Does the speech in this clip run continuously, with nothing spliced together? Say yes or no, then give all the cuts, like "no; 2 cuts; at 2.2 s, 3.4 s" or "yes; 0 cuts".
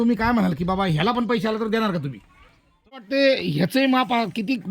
no; 1 cut; at 2.9 s